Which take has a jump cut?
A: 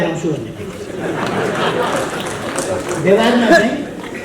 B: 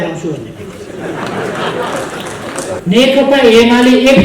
B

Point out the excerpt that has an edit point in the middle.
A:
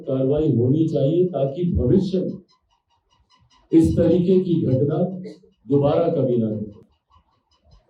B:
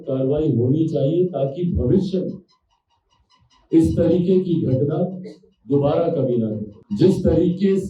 B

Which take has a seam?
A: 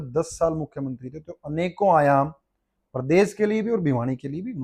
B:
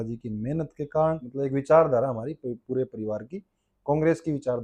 B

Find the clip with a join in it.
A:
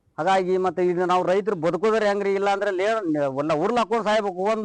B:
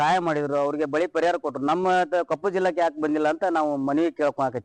A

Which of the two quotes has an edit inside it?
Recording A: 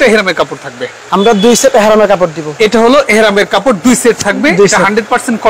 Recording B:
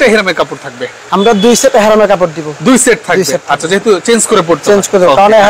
A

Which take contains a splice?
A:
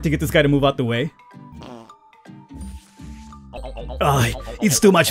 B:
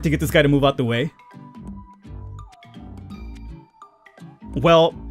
A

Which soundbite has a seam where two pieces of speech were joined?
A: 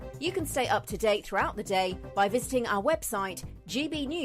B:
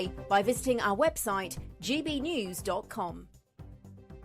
B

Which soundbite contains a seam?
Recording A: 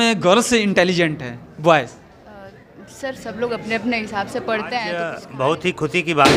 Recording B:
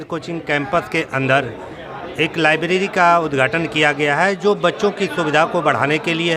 A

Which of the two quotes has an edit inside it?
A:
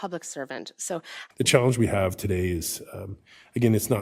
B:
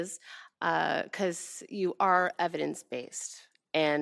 A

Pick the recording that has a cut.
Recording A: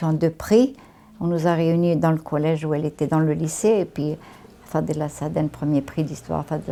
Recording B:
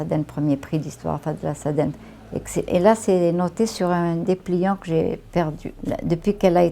B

